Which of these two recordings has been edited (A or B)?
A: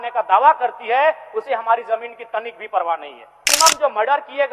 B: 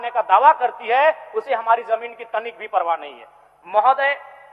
A